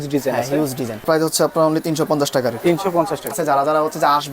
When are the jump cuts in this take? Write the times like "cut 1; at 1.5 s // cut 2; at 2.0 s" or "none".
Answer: cut 1; at 1.0 s // cut 2; at 3.3 s